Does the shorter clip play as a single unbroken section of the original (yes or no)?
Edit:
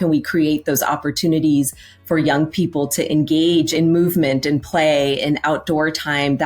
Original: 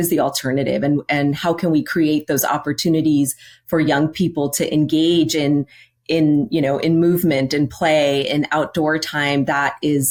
no